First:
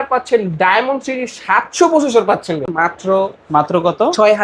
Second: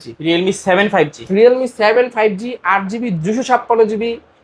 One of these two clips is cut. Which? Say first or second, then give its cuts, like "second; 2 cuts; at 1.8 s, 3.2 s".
first; 1 cut; at 2.6 s